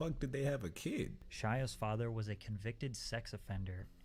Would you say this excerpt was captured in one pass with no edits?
no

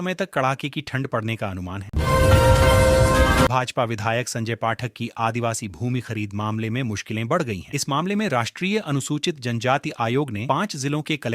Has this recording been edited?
yes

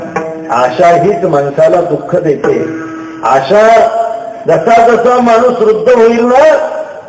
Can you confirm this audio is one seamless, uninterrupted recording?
yes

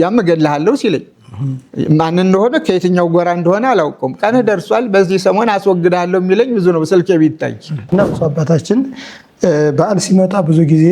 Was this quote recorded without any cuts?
no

